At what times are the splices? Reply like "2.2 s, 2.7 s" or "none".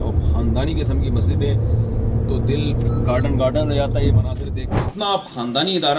4.8 s